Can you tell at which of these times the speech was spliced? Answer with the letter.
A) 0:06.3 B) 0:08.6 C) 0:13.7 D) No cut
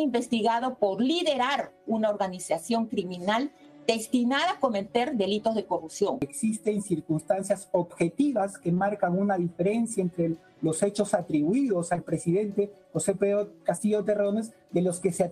A